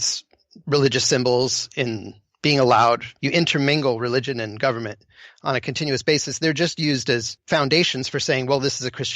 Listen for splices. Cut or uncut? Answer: cut